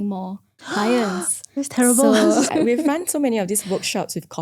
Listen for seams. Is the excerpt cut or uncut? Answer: cut